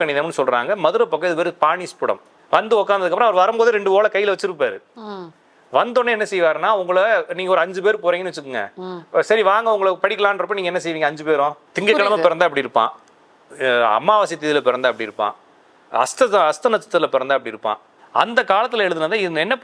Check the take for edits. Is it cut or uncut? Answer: cut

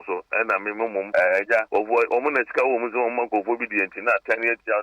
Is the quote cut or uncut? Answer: cut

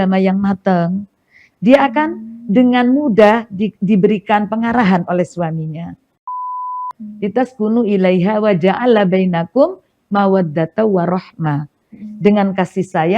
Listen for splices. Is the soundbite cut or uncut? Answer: cut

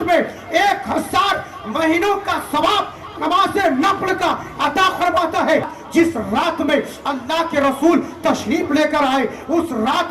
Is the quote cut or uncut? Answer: cut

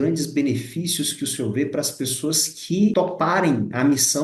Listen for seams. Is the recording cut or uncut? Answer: cut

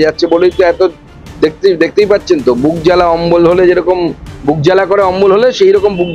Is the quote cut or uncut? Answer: uncut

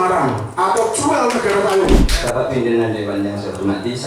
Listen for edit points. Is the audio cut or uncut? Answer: cut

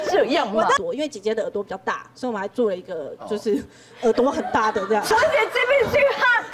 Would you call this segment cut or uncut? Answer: cut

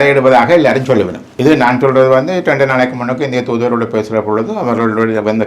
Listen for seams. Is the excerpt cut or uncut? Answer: cut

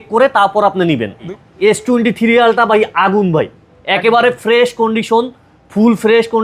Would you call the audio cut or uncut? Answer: cut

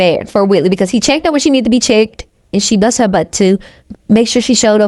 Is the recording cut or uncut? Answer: cut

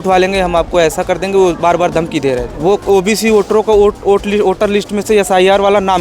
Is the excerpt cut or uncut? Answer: cut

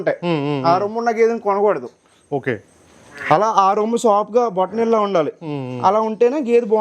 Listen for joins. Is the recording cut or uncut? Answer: uncut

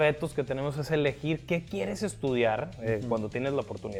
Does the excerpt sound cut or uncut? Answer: uncut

